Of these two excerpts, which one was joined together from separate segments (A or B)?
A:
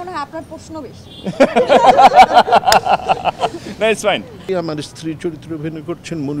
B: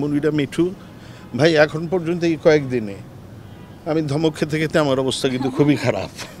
A